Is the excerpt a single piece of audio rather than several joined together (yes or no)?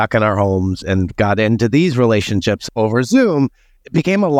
no